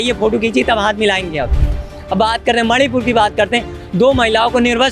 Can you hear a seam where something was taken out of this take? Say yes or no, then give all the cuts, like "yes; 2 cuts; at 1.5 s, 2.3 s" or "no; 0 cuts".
no; 0 cuts